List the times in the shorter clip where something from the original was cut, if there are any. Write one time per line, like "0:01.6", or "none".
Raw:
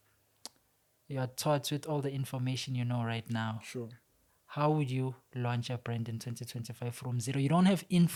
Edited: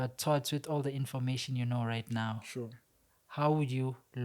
none